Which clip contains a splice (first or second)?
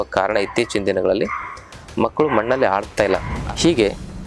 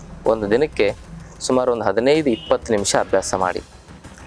first